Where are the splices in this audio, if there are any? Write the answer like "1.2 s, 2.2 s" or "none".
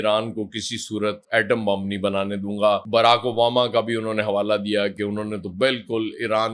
none